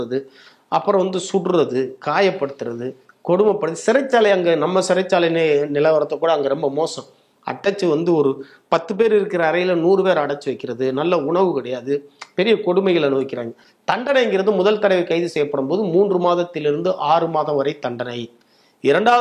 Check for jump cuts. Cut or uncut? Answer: uncut